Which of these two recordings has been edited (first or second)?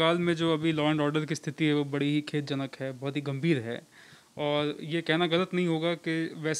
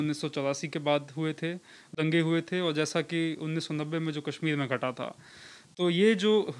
second